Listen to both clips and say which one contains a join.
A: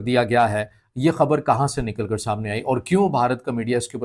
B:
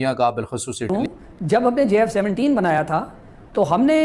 B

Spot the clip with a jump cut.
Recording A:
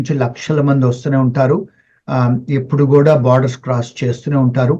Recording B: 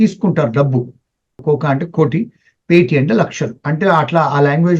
B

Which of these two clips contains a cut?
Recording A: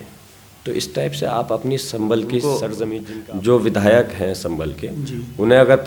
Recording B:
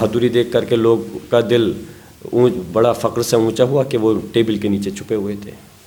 A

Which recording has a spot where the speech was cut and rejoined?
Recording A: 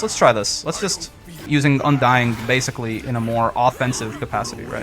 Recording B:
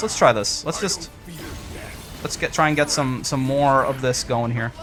A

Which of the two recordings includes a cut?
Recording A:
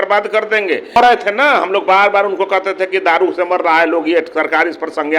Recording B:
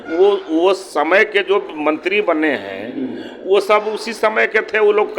A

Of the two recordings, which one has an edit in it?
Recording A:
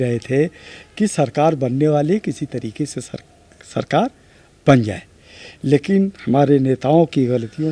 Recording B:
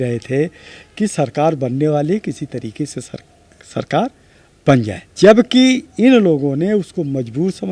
B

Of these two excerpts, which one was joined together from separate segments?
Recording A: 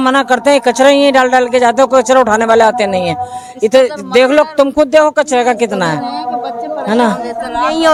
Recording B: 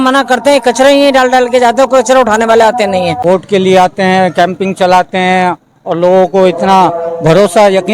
B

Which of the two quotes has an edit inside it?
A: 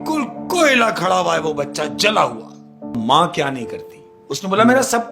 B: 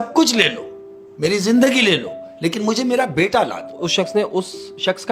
A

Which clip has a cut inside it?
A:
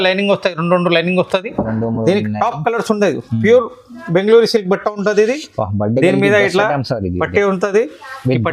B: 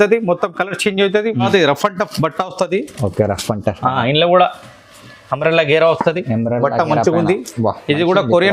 B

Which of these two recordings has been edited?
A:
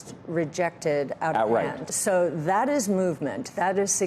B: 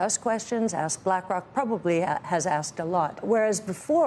B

